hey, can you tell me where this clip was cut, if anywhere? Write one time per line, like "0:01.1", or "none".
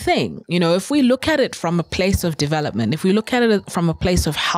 none